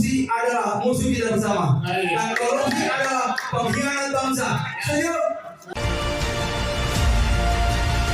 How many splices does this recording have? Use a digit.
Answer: 1